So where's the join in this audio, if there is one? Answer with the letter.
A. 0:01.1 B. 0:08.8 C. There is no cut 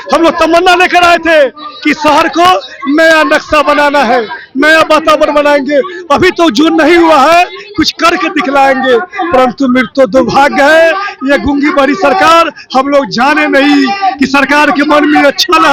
C